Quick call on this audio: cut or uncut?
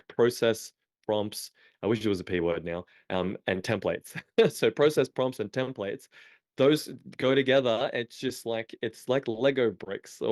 uncut